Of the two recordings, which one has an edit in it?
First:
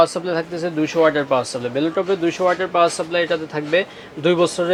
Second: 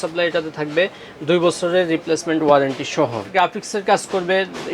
second; 1 cut; at 3.3 s

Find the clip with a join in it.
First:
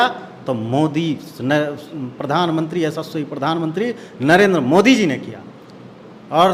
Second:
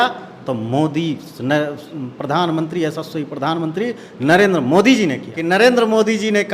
second; 1 cut; at 5.3 s

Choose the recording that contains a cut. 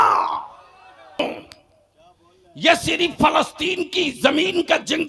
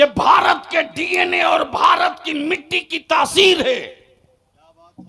first; 1 cut; at 1.2 s

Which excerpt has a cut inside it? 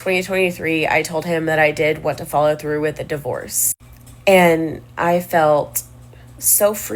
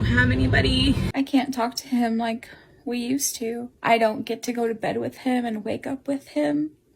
second; 2 cuts; at 1.1 s, 3.7 s

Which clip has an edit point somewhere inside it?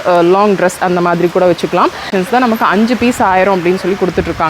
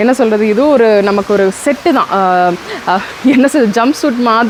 first; 1 cut; at 2.1 s

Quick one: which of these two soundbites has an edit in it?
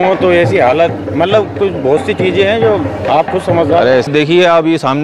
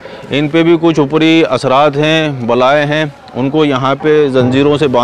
first; 1 cut; at 4.1 s

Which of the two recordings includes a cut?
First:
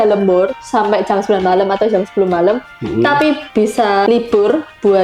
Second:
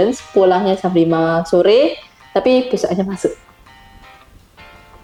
first; 1 cut; at 3.6 s

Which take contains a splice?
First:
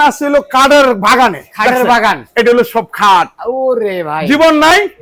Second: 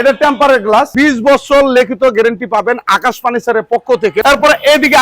second; 2 cuts; at 0.9 s, 4.2 s

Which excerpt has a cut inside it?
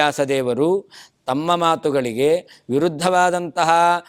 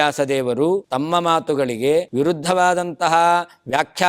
second; 2 cuts; at 0.9 s, 2.1 s

